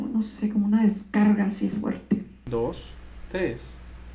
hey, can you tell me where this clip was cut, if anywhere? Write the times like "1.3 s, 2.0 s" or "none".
2.4 s